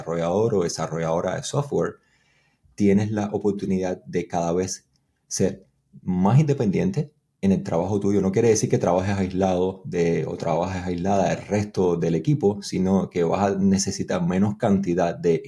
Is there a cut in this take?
no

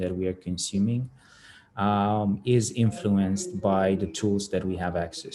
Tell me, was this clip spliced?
no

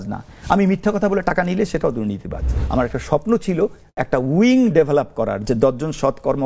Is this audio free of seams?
no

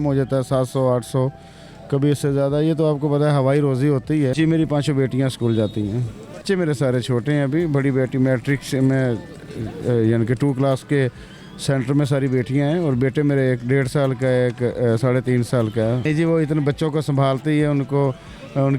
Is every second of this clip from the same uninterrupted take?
no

